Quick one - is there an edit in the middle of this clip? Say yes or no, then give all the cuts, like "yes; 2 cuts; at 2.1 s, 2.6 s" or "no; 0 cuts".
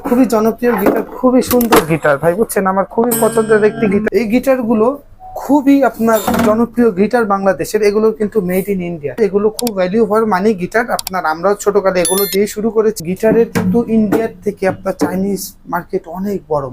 yes; 3 cuts; at 4.0 s, 9.2 s, 13.0 s